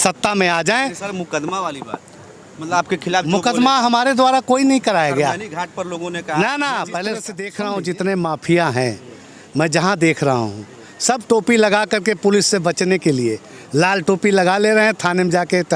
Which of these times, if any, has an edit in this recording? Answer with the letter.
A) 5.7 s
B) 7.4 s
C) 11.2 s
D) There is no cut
B